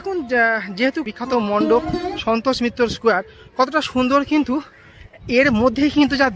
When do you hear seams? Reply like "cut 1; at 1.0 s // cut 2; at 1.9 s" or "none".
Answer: cut 1; at 1.0 s